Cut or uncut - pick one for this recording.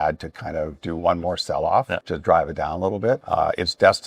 cut